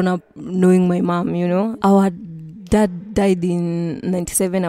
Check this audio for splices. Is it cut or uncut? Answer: uncut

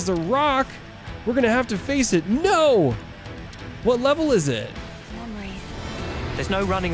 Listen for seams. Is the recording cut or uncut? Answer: cut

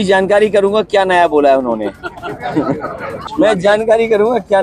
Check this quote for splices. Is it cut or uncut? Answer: cut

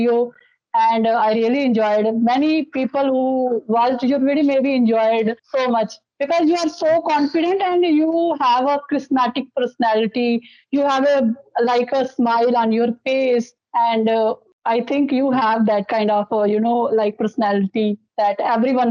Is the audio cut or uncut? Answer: uncut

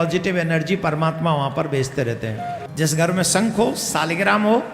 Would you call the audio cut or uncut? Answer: cut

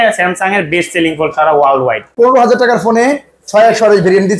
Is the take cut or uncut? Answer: cut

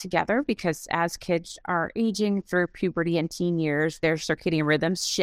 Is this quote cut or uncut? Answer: uncut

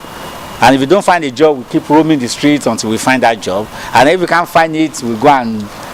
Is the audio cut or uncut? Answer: uncut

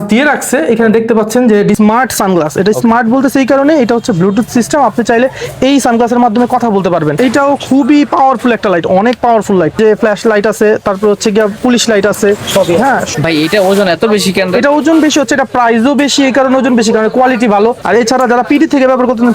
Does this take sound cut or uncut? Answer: cut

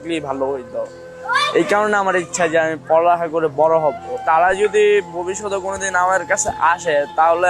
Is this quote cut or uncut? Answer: cut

